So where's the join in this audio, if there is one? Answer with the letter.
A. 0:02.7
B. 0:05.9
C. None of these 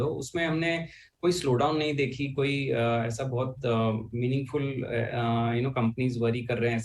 B